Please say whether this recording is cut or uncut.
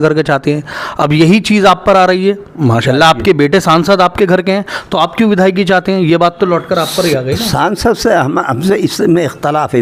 uncut